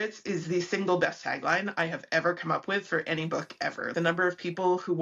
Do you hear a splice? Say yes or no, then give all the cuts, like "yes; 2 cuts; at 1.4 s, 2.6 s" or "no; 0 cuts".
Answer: yes; 1 cut; at 3.9 s